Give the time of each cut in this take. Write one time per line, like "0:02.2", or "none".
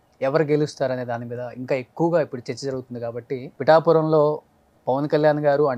0:03.5